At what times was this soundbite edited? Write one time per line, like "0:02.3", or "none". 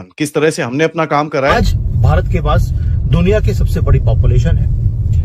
0:01.5